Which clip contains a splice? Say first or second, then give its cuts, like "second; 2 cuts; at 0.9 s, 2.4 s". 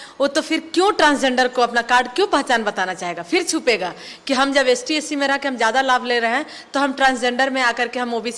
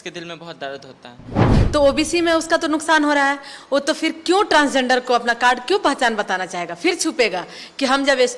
second; 1 cut; at 1.5 s